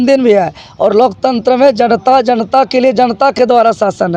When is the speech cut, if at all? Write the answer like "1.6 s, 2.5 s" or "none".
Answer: none